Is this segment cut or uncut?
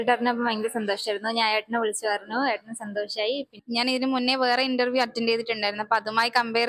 cut